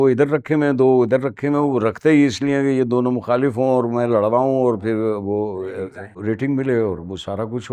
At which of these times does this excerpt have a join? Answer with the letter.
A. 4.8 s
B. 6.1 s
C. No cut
B